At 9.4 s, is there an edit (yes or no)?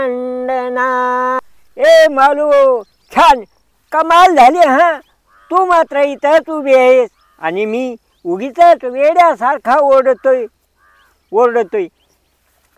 no